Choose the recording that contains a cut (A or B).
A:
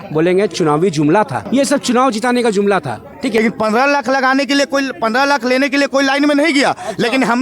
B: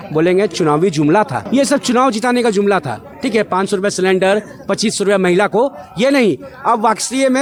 A